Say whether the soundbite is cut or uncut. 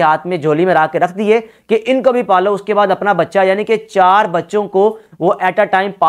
uncut